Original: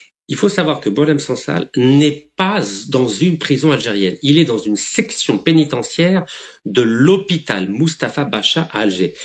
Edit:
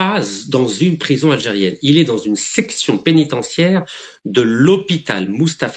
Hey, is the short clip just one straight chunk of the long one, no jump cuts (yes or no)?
yes